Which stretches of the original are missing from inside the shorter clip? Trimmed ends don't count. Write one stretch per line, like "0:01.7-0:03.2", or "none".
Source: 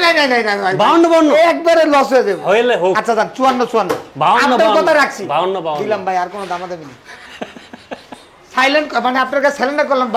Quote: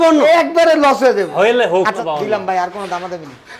0:03.1-0:05.6